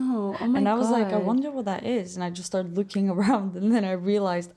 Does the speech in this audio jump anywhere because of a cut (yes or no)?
no